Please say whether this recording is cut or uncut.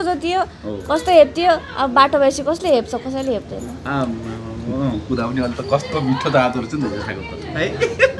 uncut